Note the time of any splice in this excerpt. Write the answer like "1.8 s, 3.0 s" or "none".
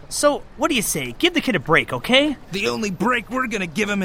2.5 s